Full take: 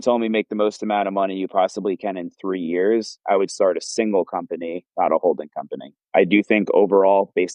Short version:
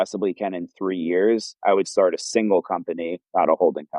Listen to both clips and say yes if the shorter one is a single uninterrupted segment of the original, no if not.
yes